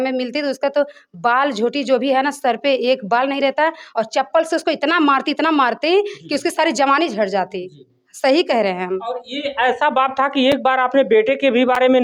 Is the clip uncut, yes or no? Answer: yes